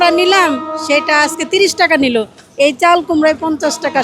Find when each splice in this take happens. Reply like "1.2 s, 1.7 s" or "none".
none